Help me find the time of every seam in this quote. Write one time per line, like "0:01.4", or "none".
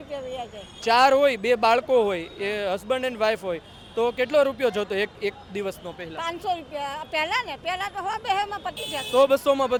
none

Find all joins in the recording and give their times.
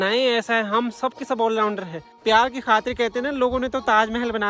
0:02.2

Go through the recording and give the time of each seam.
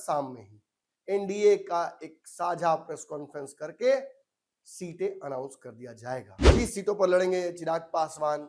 0:06.4

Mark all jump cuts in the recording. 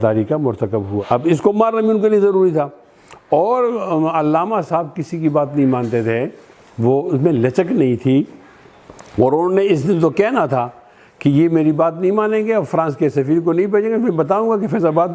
0:01.0

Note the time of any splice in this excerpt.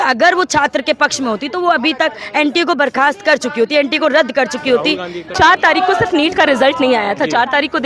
0:05.2

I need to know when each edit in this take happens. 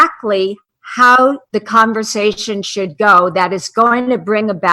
0:01.4

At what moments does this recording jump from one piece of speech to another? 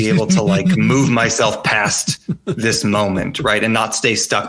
none

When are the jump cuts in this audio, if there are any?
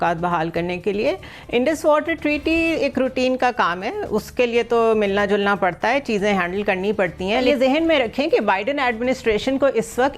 0:07.4

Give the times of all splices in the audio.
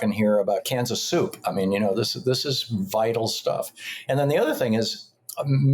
none

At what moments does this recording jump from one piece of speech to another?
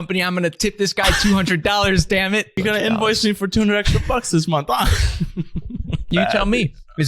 0:02.6
0:06.1

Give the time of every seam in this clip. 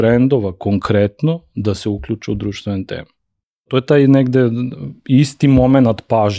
0:03.7

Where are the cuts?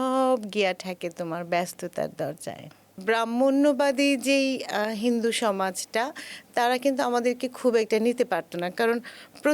0:02.9

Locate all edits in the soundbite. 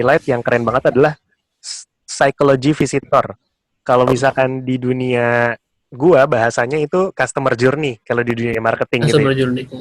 none

